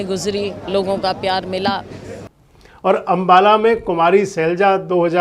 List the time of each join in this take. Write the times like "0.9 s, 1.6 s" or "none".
2.3 s